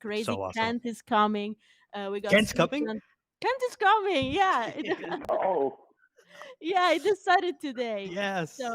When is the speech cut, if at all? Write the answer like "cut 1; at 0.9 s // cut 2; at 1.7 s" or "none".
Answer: none